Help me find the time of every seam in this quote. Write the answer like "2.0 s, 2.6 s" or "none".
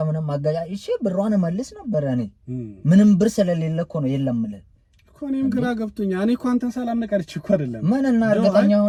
none